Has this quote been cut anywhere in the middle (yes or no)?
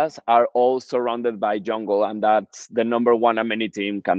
no